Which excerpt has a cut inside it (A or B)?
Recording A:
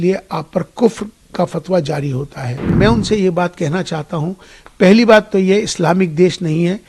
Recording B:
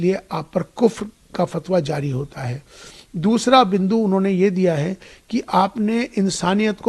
A